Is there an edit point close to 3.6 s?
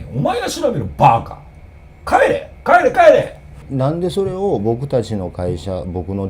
yes; 1 cut; at 3.6 s

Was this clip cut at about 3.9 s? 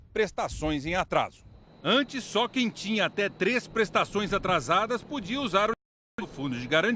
yes; 1 cut; at 3.9 s

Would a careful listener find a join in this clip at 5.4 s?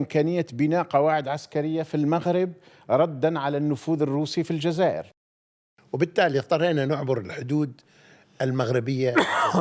yes; 1 cut; at 5.4 s

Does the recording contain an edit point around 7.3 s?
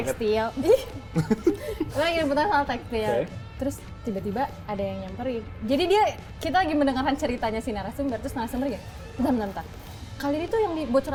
no; 0 cuts

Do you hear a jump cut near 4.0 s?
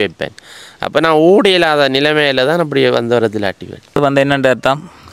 yes; 1 cut; at 4.0 s

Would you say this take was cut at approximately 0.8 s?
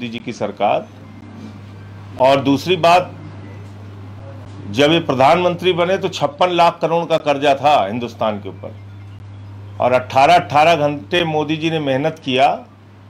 no; 0 cuts

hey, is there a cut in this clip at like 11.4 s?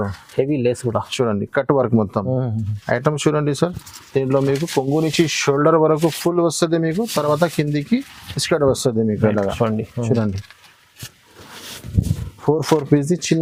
no; 0 cuts

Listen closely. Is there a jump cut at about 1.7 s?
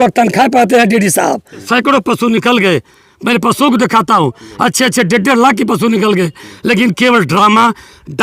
yes; 1 cut; at 1.7 s

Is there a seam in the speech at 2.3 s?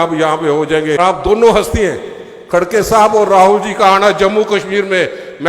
no; 1 cut; at 1.0 s

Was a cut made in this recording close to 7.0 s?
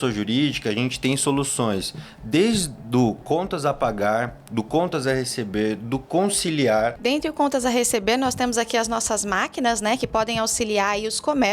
yes; 1 cut; at 7.0 s

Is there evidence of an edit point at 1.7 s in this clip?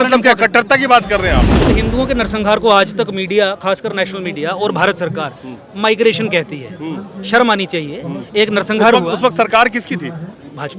yes; 1 cut; at 1.7 s

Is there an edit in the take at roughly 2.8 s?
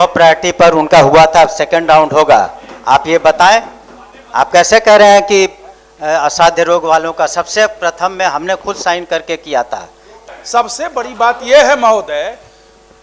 no; 1 cut; at 10.3 s

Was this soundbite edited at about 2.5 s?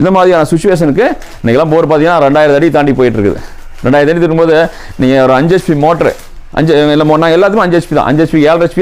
no; 1 cut; at 1.3 s

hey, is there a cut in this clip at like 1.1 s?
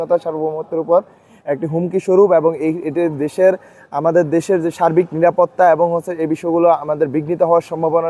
no; 0 cuts

